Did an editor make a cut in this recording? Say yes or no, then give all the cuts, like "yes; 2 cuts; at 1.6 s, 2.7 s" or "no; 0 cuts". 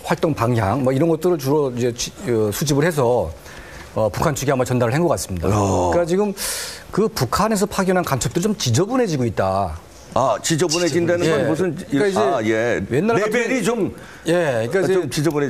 no; 0 cuts